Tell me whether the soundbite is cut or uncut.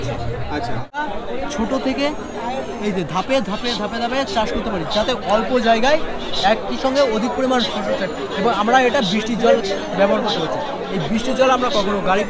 cut